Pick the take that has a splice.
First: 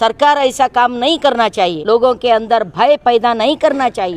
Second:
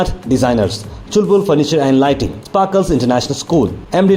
first; 1 cut; at 1.8 s

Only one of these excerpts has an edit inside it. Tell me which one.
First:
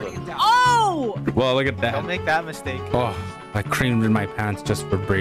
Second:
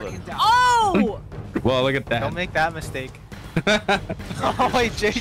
first; 2 cuts; at 1.1 s, 2.8 s

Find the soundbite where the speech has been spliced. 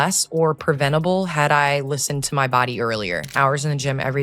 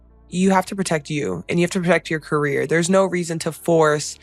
first; 1 cut; at 3.3 s

